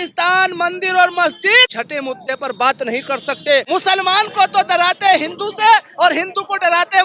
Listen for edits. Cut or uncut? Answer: cut